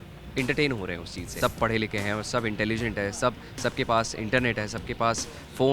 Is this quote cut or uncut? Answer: cut